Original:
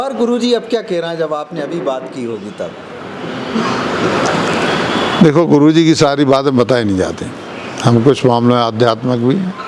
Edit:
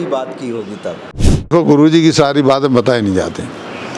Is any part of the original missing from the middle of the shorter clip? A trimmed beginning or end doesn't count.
yes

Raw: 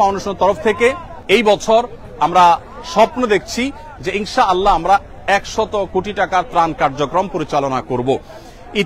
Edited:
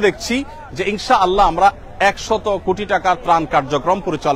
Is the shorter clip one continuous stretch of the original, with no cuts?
yes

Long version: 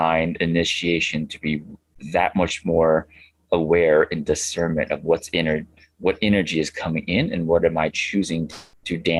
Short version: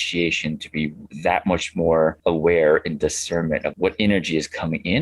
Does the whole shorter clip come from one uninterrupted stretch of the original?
no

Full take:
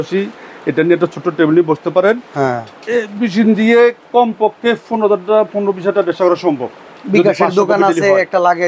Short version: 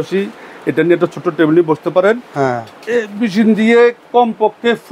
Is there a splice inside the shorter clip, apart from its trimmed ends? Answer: no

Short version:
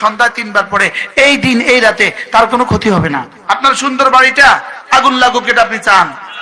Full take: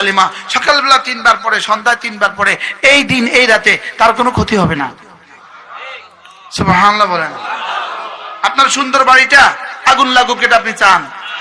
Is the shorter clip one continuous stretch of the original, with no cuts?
no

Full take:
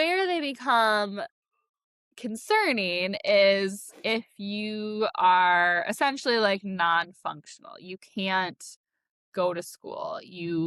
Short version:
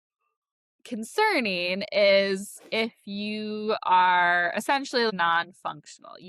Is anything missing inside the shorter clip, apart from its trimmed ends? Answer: yes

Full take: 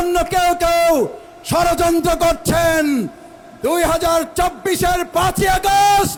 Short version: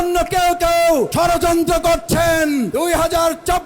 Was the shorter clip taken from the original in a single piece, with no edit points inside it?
no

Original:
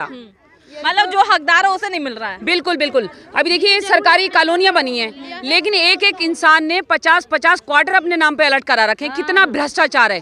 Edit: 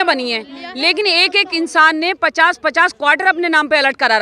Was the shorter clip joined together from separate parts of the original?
no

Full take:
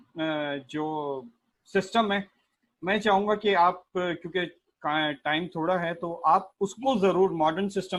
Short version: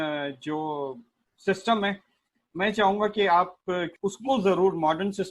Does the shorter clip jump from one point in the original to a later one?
yes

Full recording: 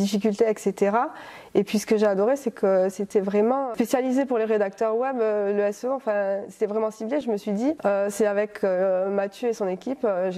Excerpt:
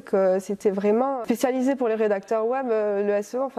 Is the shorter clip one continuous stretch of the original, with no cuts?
yes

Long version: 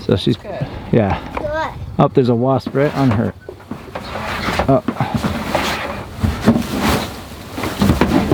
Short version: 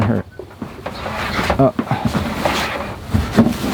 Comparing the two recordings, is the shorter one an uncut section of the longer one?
yes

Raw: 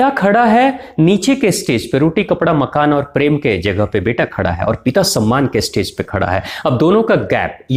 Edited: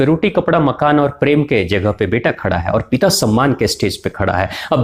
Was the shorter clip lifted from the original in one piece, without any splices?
yes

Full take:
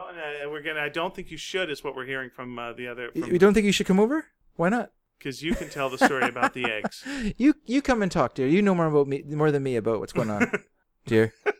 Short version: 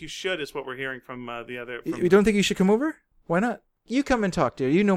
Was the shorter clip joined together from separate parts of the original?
yes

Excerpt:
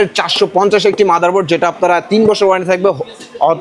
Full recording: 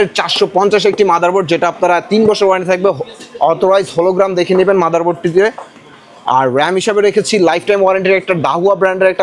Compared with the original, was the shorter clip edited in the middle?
no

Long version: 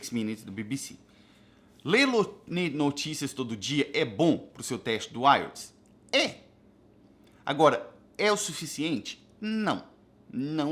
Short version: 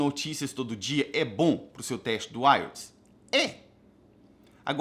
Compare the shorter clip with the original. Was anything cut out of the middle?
no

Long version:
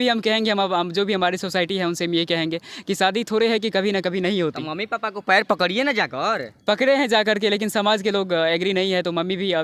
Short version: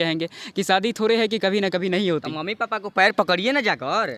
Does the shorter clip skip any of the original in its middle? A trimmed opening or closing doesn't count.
no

